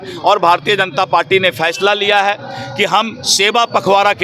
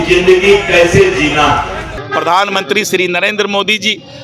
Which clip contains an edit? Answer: second; 1 cut; at 2.0 s

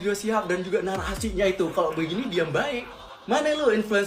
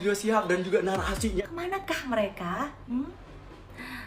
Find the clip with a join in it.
second; 1 cut; at 1.4 s

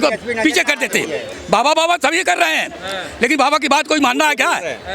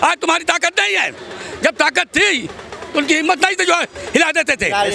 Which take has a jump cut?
first; 1 cut; at 1.3 s

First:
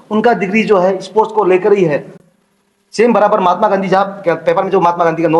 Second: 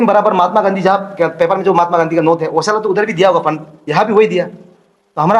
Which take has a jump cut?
first; 1 cut; at 2.2 s

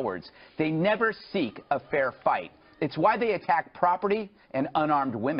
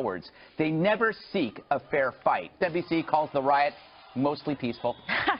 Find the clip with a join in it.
first; 1 cut; at 2.5 s

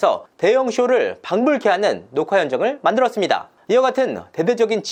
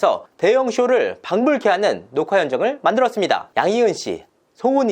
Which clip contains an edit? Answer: second; 1 cut; at 3.5 s

